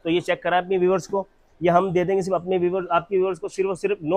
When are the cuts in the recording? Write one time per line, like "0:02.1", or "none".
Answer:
none